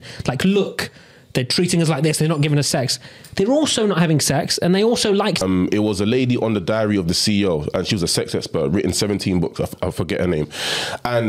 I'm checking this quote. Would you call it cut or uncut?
cut